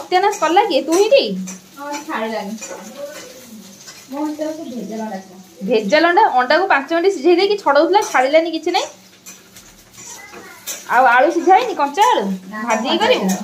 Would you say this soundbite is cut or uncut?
uncut